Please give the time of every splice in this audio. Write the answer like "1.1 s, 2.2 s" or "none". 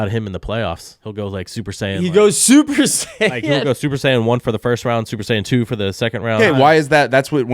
0.9 s, 6.4 s